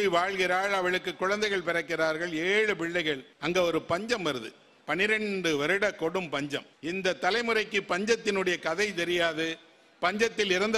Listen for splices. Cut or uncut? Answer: cut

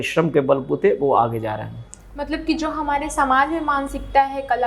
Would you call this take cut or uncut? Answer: uncut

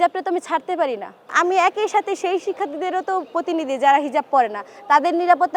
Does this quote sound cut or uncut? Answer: cut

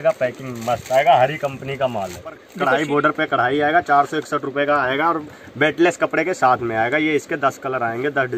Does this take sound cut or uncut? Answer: cut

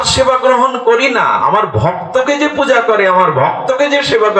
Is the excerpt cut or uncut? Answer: uncut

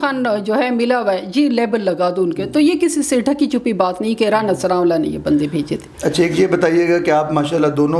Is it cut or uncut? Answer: uncut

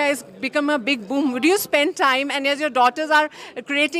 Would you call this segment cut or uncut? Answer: uncut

